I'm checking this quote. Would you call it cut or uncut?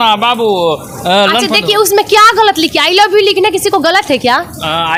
uncut